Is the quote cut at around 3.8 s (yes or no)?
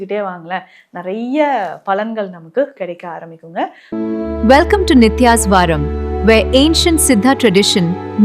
yes